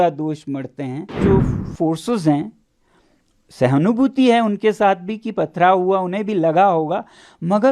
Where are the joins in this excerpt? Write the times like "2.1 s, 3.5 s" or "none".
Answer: 1.2 s